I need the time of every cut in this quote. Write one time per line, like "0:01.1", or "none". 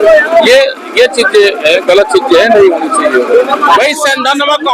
0:03.8